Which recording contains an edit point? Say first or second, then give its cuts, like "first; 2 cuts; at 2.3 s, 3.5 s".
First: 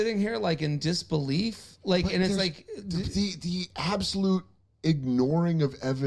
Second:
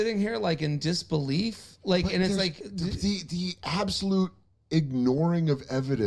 second; 1 cut; at 2.6 s